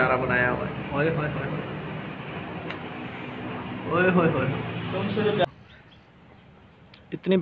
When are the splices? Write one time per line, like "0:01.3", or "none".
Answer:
0:05.4